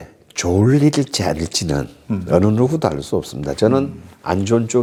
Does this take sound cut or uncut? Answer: uncut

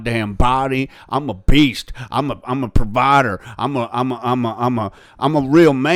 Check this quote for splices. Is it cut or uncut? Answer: uncut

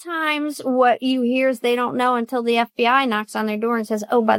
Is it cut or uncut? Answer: uncut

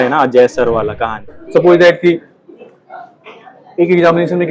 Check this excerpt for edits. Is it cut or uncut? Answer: cut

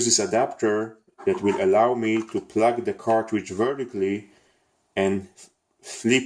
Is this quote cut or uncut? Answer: cut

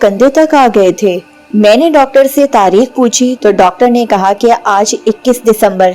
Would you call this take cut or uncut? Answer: uncut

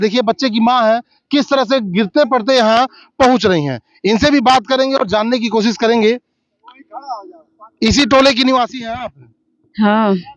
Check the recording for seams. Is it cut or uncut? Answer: uncut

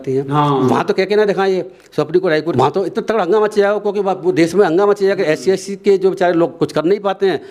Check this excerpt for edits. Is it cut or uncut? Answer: cut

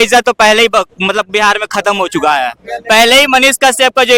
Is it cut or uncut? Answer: uncut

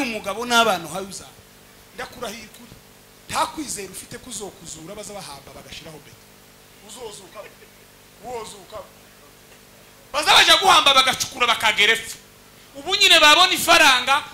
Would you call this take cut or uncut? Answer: uncut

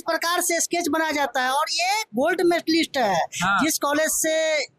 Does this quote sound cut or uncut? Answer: uncut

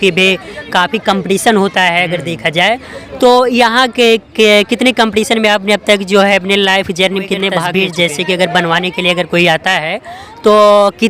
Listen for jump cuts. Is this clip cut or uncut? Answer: cut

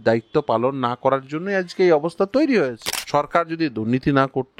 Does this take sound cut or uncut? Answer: cut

